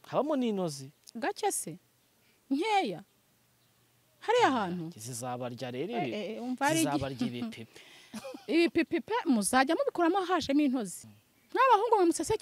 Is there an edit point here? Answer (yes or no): yes